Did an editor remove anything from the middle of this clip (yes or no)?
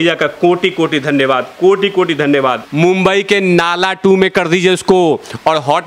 yes